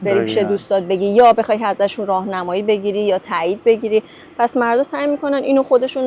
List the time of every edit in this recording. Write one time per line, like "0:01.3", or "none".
none